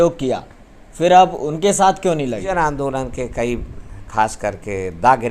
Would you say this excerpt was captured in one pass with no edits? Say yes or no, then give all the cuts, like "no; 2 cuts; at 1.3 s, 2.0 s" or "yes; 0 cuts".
no; 1 cut; at 2.4 s